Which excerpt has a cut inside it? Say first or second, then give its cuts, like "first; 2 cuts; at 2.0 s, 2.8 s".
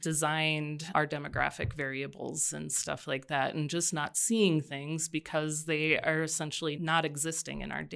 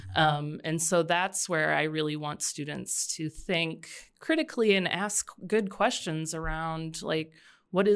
first; 2 cuts; at 0.8 s, 6.8 s